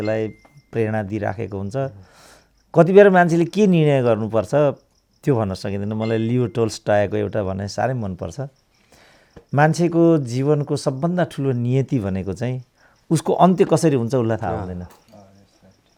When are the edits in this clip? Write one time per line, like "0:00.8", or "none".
none

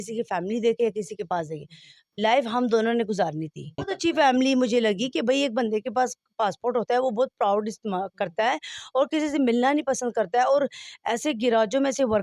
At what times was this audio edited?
0:03.9

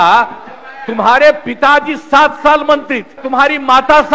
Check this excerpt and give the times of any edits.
0:03.2

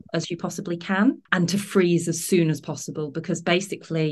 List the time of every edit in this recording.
0:01.3

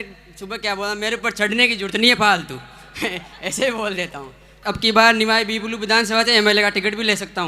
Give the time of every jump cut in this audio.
0:04.6

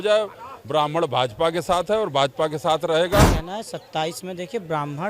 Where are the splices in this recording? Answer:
0:03.4

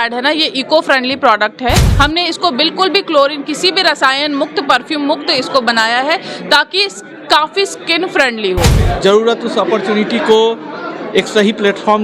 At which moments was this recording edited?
0:01.9
0:08.8

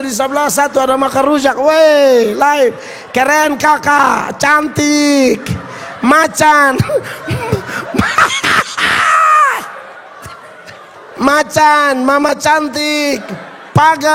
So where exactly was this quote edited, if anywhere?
0:10.9

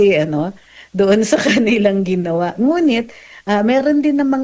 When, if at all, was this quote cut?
none

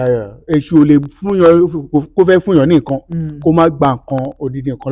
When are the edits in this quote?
none

